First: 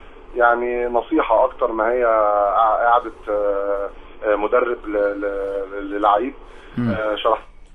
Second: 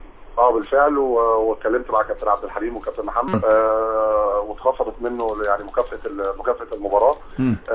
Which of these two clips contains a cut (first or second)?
first